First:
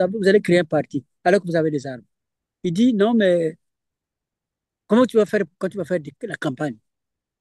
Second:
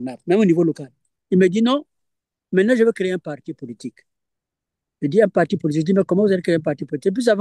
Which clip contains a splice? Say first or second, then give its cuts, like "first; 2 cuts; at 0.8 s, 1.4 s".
second; 1 cut; at 1.1 s